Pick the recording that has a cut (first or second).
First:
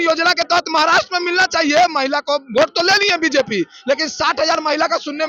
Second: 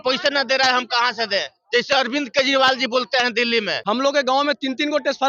second